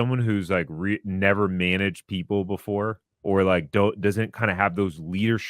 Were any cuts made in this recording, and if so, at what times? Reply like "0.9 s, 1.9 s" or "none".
3.1 s